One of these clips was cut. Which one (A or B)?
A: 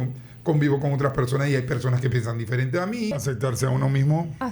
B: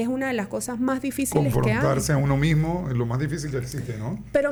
A